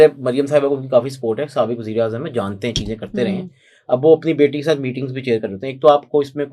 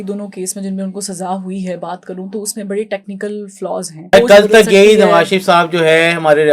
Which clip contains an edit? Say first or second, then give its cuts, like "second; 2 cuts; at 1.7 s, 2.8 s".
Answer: second; 1 cut; at 4.1 s